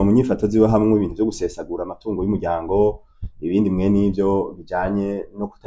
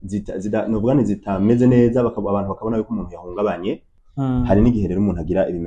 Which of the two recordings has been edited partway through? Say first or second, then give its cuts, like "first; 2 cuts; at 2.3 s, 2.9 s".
second; 1 cut; at 4.0 s